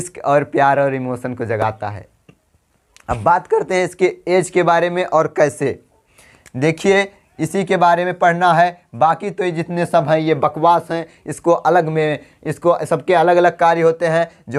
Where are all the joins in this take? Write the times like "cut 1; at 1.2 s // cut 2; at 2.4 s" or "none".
none